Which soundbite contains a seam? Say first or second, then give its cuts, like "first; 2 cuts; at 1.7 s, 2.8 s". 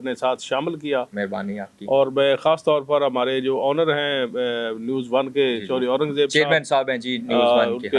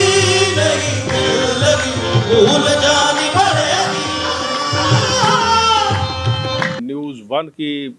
second; 1 cut; at 6.8 s